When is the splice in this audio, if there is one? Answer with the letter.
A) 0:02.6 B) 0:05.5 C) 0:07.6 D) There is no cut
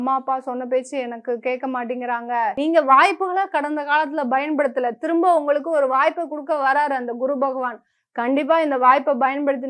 A